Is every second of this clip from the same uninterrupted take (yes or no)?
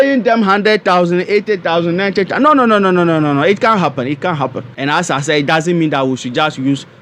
no